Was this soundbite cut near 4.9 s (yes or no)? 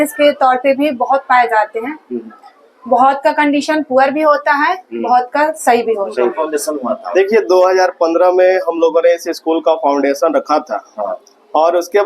no